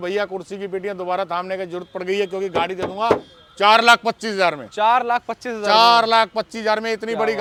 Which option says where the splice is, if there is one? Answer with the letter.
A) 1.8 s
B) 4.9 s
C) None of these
C